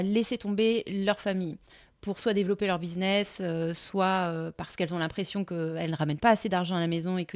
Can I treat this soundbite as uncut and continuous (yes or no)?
yes